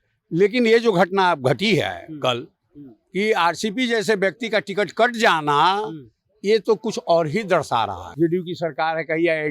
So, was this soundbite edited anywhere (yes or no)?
yes